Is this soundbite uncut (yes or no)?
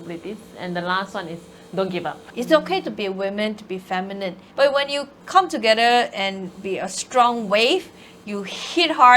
no